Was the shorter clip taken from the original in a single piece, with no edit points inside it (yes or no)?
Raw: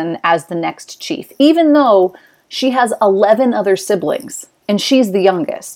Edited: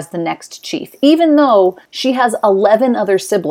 no